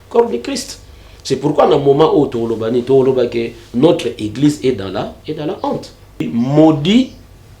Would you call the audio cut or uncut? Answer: cut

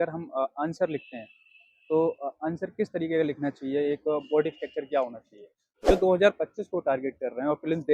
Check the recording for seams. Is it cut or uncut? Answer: cut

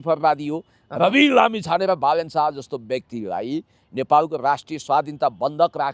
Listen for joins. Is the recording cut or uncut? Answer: uncut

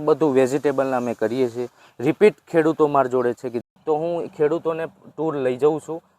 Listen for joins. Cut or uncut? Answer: cut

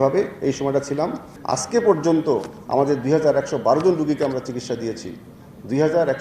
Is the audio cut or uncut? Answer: cut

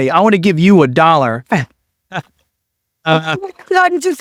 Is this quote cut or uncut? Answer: uncut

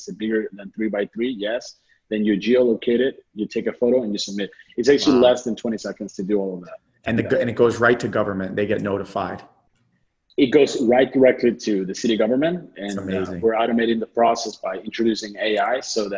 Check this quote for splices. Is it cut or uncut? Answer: uncut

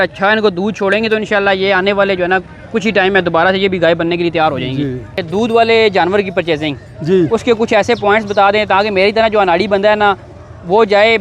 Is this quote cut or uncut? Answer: cut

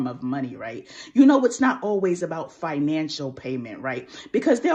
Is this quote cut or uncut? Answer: uncut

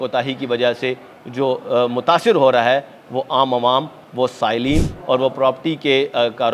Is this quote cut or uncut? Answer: uncut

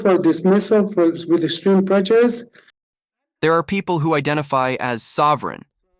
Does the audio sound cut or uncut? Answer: uncut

